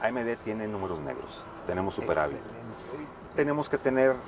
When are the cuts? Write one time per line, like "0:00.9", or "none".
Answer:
0:03.2